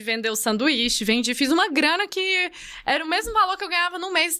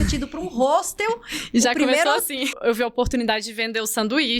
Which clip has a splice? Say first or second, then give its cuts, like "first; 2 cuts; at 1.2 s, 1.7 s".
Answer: second; 1 cut; at 2.6 s